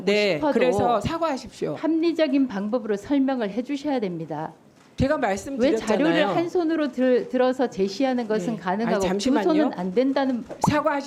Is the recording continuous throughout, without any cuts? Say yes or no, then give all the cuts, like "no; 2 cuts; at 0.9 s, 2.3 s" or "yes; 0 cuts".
yes; 0 cuts